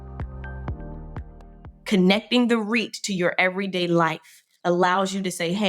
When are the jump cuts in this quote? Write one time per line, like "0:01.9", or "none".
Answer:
0:01.5